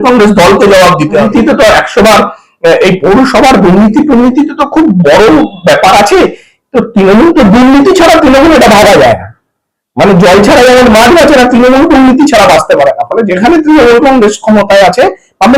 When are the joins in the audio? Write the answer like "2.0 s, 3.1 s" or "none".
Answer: 1.3 s